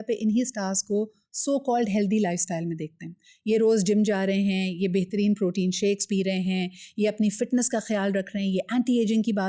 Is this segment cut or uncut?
uncut